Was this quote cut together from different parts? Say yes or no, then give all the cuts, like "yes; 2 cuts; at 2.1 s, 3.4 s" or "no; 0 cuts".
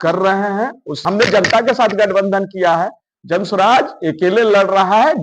yes; 1 cut; at 0.9 s